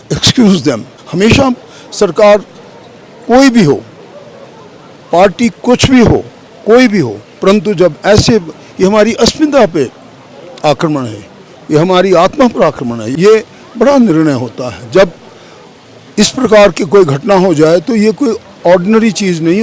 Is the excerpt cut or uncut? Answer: cut